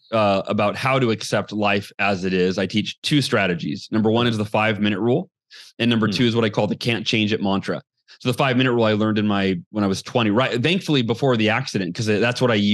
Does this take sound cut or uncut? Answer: uncut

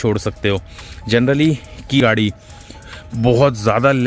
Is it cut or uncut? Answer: cut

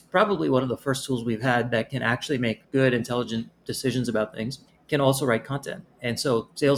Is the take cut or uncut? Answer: uncut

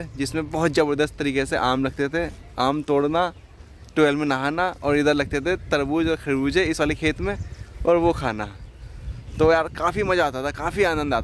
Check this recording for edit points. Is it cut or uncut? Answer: uncut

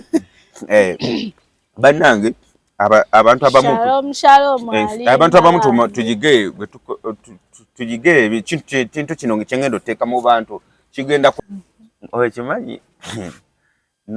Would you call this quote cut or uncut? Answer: cut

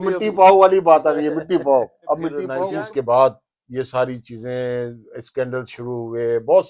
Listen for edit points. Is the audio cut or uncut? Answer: cut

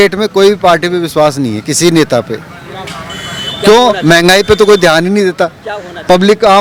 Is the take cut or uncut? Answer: uncut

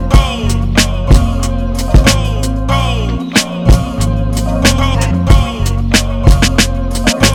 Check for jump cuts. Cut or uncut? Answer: uncut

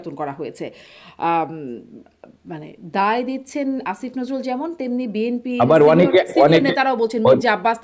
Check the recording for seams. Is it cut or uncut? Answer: uncut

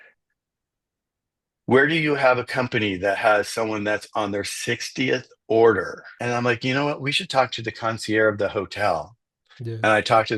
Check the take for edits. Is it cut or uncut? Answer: cut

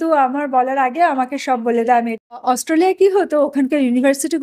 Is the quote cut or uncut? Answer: cut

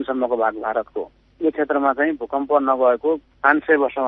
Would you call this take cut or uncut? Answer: uncut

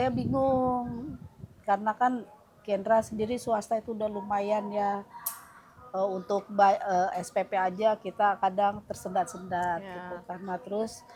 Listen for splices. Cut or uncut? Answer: uncut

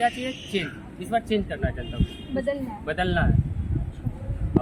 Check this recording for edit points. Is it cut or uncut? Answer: uncut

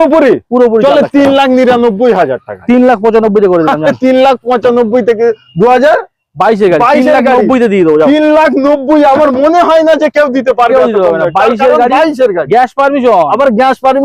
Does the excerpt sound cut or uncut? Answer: uncut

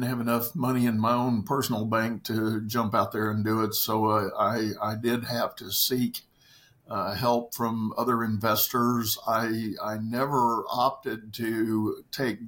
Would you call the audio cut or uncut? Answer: uncut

